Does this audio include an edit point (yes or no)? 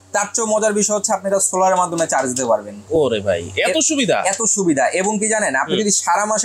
no